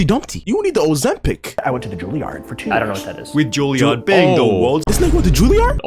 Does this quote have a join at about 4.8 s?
yes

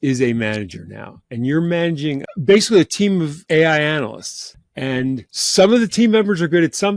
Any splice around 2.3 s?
yes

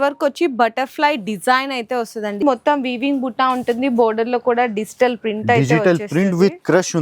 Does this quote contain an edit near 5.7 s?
no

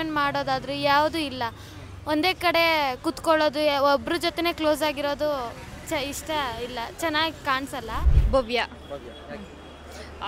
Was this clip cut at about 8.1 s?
yes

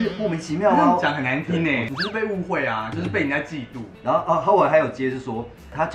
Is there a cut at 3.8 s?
yes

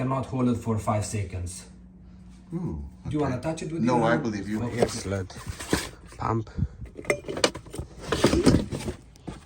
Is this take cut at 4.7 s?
yes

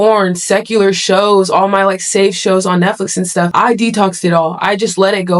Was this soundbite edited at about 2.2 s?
no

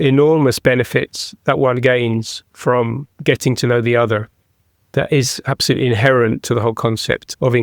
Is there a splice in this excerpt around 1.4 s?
no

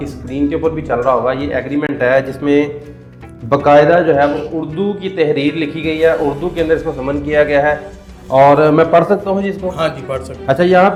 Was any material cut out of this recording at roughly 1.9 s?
no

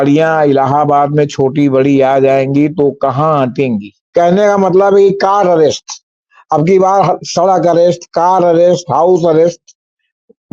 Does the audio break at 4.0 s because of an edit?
yes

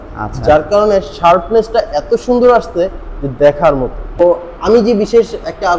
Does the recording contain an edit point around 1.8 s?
no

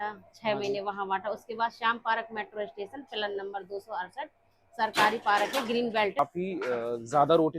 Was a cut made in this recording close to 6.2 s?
yes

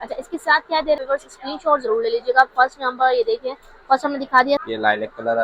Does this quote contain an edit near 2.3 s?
no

